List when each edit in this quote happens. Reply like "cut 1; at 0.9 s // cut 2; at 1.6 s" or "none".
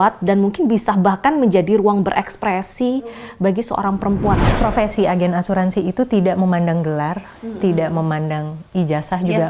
cut 1; at 4.4 s